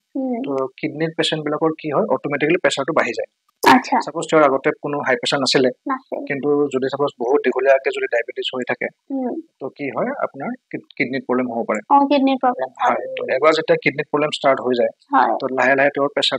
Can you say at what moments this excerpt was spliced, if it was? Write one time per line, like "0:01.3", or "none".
none